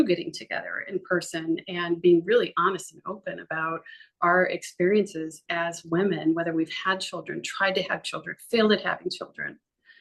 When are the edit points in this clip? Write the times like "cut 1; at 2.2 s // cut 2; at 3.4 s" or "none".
none